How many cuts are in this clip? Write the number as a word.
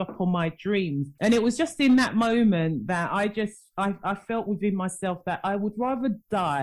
one